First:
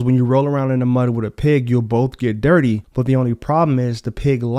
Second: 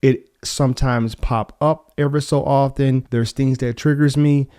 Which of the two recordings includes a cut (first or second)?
second